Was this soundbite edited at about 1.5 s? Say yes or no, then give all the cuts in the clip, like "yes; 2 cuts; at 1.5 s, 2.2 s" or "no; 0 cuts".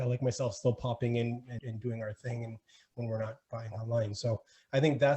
yes; 1 cut; at 1.5 s